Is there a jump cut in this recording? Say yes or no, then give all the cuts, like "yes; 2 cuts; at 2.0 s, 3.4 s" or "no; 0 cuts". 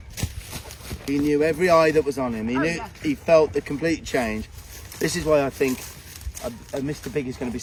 no; 0 cuts